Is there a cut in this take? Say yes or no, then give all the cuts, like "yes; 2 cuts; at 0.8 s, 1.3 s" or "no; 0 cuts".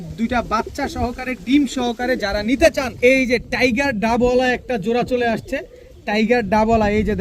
yes; 1 cut; at 2.9 s